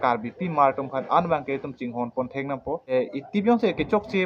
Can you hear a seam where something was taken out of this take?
yes; 1 cut; at 2.9 s

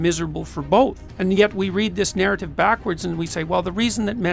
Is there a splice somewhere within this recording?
yes; 1 cut; at 1.1 s

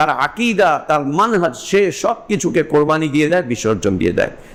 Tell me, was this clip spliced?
no; 0 cuts

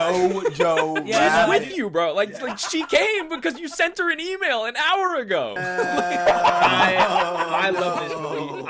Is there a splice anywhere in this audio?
yes; 2 cuts; at 1.5 s, 5.8 s

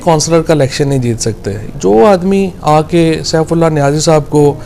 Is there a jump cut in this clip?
yes; 1 cut; at 1.7 s

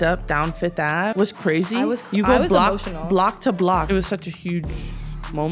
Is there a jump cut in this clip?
yes; 2 cuts; at 1.1 s, 3.9 s

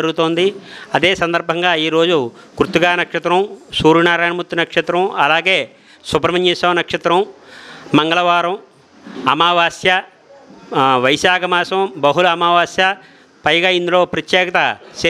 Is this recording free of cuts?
yes; 0 cuts

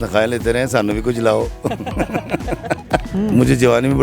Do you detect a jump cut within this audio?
yes; 1 cut; at 3.1 s

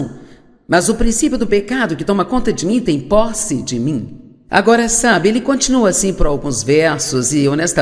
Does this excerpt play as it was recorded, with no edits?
no; 1 cut; at 6.7 s

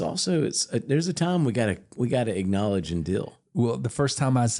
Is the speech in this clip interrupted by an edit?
no; 0 cuts

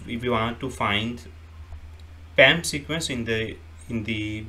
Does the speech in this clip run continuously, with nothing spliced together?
yes; 0 cuts

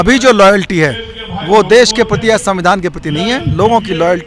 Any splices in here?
no; 0 cuts

